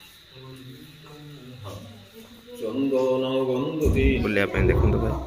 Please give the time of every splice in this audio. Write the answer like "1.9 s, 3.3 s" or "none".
4.2 s